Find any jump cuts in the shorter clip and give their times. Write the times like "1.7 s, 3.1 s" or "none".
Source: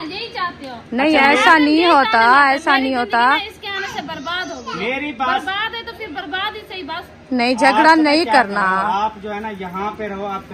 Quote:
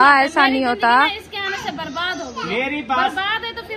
none

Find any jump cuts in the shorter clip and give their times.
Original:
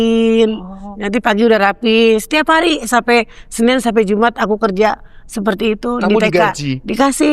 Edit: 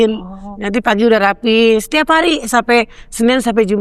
none

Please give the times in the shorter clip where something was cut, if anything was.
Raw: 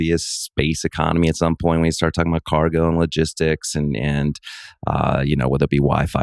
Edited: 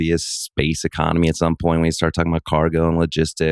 none

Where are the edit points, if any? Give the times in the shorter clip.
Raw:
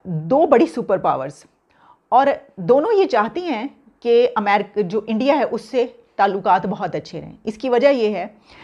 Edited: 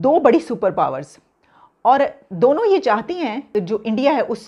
3.5 s

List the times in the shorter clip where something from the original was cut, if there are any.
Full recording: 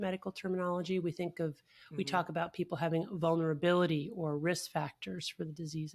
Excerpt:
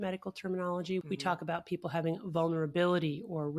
1.0 s

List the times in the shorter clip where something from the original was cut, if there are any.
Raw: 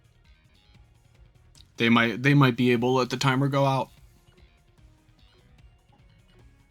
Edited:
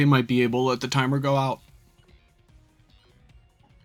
none

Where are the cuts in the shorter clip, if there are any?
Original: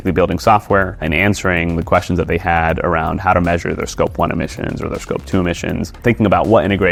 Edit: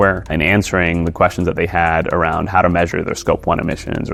none

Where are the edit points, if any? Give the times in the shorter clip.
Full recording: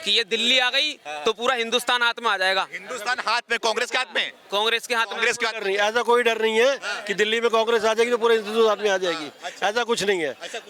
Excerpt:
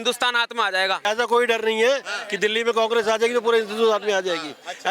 1.0 s

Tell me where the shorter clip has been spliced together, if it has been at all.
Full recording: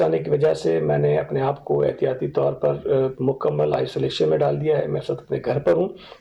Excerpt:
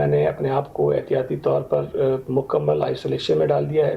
none

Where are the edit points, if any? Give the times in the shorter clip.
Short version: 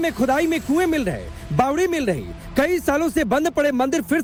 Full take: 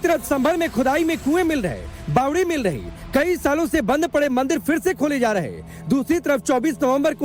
none

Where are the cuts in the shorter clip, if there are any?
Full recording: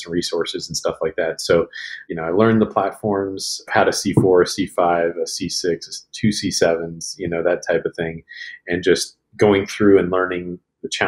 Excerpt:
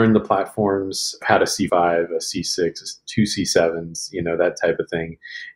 1.6 s

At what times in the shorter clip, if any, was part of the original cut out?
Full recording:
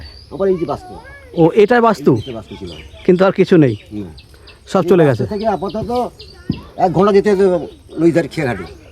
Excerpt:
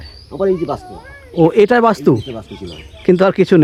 none

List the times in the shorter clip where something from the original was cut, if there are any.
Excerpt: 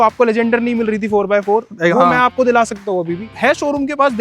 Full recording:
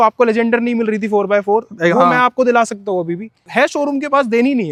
3.2 s

